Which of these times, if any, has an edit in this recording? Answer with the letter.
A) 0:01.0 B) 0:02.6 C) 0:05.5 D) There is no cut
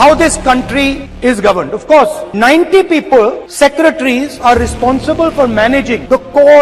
D